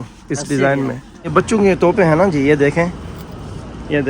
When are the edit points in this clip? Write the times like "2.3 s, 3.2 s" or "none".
1.1 s